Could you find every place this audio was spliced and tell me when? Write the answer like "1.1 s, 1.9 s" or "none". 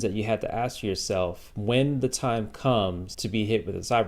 1.5 s, 3.1 s